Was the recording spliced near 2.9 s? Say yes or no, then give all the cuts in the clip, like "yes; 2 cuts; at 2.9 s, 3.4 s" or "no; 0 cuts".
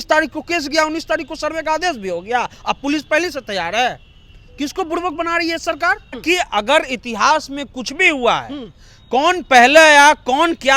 no; 1 cut; at 6.2 s